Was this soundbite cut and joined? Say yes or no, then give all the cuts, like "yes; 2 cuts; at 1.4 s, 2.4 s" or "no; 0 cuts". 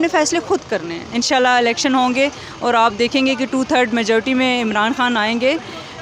yes; 1 cut; at 1.0 s